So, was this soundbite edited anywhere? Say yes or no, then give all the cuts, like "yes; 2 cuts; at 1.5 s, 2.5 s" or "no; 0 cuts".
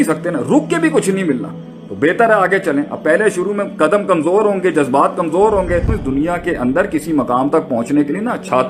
yes; 1 cut; at 5.9 s